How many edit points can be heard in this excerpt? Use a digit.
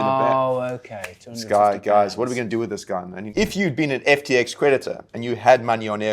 1